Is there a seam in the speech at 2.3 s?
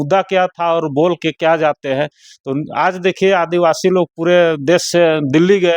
no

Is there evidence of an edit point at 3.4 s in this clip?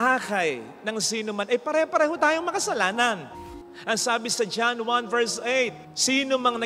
yes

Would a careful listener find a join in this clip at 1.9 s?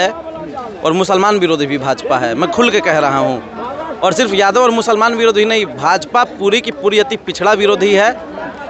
no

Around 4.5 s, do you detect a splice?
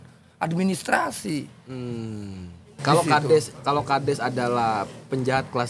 no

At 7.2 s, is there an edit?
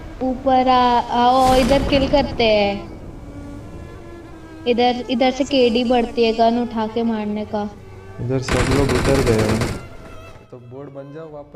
no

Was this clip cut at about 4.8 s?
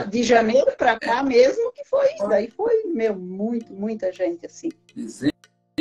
yes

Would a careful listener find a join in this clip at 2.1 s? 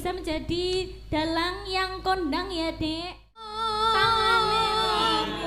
no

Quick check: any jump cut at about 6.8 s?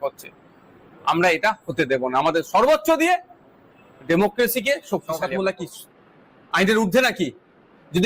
no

